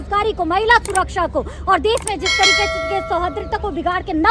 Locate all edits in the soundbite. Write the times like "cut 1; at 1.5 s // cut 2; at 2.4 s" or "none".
none